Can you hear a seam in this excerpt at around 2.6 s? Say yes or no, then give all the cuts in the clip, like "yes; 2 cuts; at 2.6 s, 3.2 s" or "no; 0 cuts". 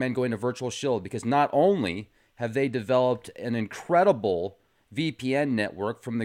no; 1 cut; at 1.4 s